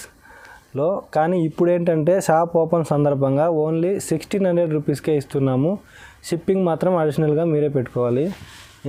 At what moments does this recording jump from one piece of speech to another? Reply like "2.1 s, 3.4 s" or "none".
none